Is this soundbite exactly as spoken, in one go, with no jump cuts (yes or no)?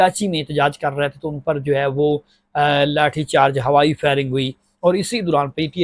yes